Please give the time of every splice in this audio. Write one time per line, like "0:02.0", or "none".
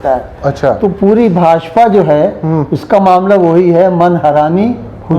none